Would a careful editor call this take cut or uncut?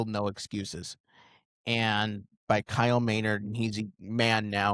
uncut